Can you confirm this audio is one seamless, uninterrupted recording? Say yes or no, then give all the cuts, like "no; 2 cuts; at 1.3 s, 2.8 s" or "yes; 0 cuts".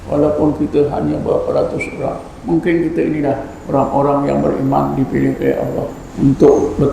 no; 3 cuts; at 2.3 s, 3.5 s, 6.0 s